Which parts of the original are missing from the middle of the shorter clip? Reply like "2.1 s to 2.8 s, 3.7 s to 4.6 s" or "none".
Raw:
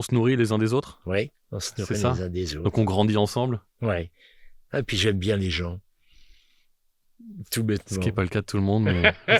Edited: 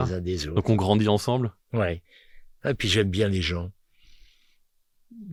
none

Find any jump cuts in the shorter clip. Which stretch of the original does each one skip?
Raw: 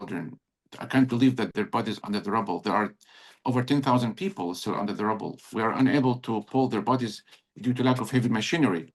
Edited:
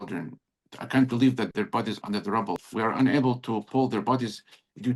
2.6 s to 5.4 s

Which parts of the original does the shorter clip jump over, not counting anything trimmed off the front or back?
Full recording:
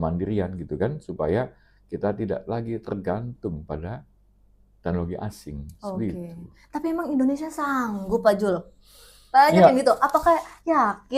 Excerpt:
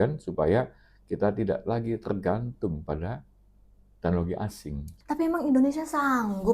5.7 s to 6.5 s

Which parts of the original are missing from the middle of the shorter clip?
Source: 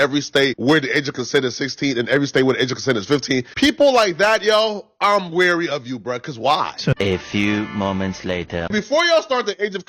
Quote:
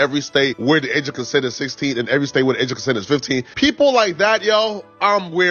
none

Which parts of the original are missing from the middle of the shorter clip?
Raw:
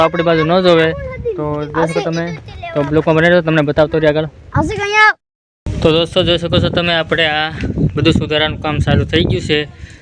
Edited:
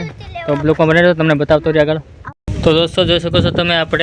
4.4 s to 5.3 s

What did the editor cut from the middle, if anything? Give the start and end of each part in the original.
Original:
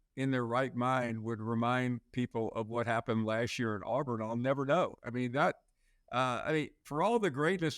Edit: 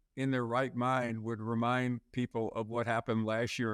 none

